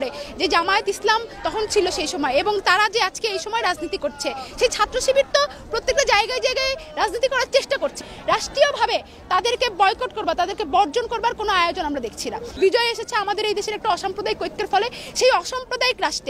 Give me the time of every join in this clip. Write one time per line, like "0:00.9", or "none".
0:04.5
0:08.0
0:12.5